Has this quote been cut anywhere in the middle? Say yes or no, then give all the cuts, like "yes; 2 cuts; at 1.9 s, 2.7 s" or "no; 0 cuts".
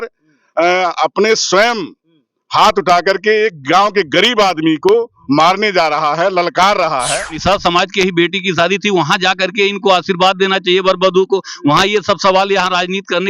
yes; 1 cut; at 7.4 s